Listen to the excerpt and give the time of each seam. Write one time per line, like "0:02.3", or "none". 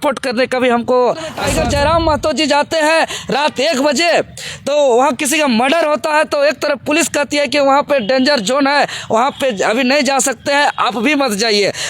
0:01.4